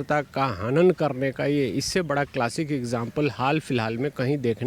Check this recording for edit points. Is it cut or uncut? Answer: uncut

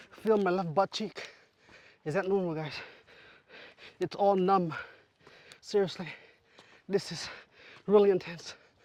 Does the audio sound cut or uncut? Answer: uncut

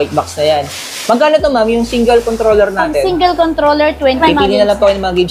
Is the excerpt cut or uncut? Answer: cut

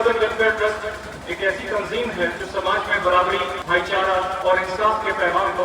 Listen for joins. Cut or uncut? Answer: cut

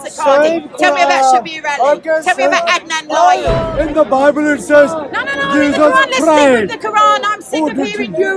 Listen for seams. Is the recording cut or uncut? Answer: cut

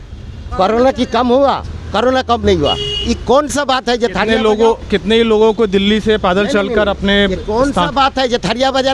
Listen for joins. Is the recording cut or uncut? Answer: uncut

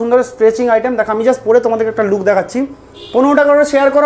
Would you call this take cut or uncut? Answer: uncut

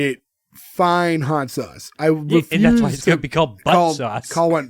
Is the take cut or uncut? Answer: uncut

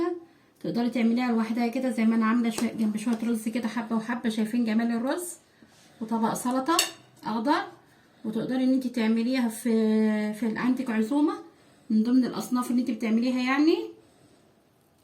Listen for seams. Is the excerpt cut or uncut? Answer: uncut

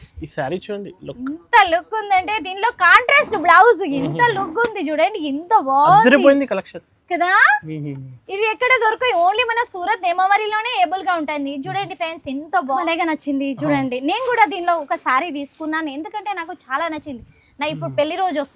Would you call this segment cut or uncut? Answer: cut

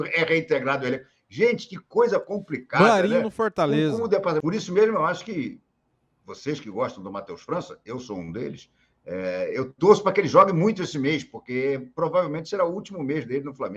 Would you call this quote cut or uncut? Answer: cut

